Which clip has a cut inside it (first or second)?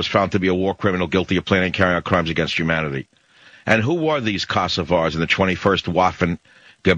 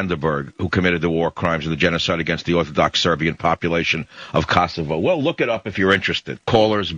first